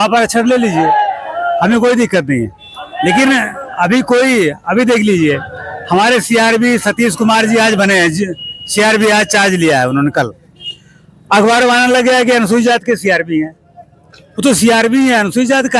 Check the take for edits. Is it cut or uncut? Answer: uncut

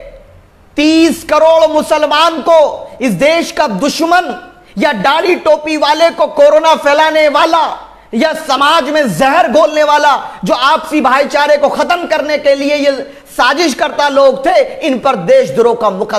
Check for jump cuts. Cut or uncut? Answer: uncut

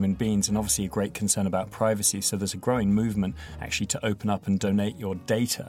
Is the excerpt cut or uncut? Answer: uncut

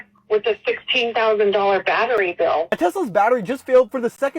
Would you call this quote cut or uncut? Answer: cut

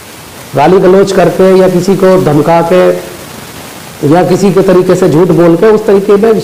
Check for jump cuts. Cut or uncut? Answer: uncut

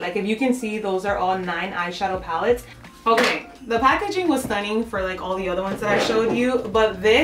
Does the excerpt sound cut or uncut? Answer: cut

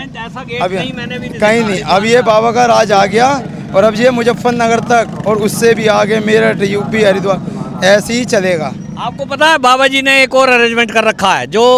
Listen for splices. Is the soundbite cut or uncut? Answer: uncut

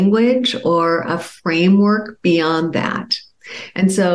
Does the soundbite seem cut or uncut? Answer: uncut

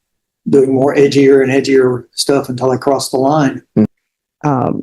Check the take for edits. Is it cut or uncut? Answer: cut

